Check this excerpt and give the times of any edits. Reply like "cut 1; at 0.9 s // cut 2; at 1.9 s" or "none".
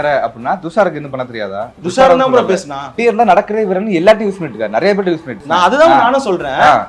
cut 1; at 1.6 s // cut 2; at 3.0 s // cut 3; at 5.3 s